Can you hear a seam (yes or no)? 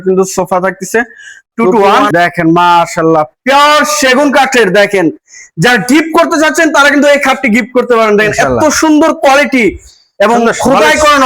yes